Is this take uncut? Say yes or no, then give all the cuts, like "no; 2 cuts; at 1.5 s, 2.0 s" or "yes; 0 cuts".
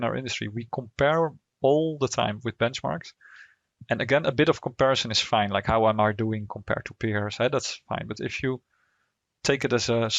yes; 0 cuts